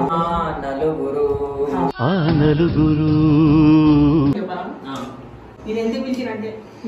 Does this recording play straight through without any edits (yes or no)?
no